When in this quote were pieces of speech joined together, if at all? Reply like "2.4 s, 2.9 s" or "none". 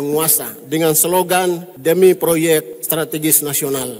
1.7 s, 2.8 s